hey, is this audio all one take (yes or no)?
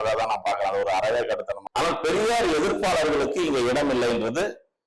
no